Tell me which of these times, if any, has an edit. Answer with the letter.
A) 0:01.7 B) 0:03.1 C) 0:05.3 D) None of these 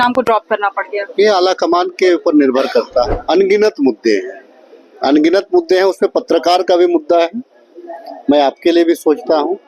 B